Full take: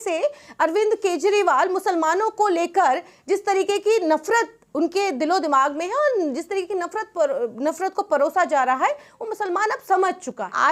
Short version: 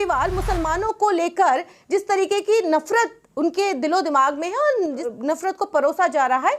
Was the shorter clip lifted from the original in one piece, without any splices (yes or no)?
no